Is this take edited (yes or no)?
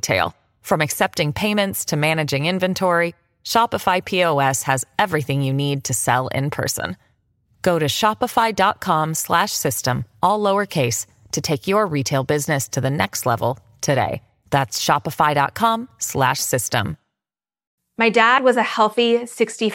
yes